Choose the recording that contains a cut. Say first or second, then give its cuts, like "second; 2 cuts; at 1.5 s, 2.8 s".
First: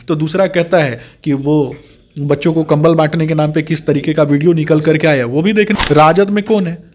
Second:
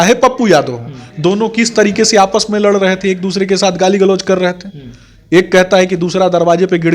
first; 1 cut; at 5.7 s